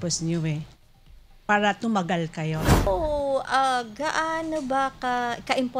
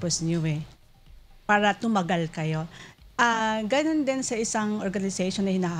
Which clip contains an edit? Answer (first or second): first